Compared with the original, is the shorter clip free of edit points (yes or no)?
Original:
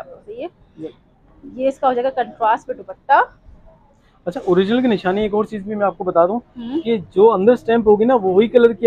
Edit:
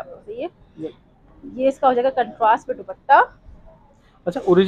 yes